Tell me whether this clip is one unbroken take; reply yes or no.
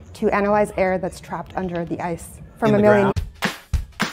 no